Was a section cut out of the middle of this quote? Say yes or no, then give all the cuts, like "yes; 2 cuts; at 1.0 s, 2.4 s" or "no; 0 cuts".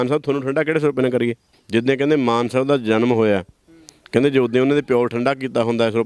yes; 1 cut; at 1.5 s